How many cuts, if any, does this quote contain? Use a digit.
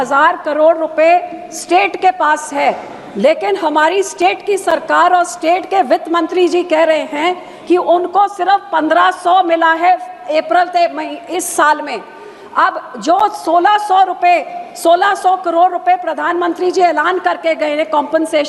0